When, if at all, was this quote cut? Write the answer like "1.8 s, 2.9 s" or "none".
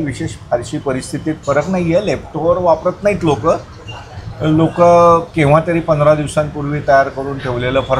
none